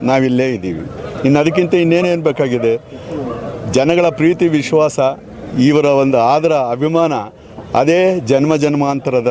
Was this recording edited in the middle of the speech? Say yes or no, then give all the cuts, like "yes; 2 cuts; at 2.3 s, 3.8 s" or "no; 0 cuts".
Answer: no; 0 cuts